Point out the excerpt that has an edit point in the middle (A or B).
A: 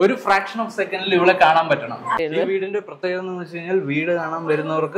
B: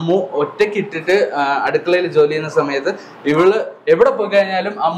A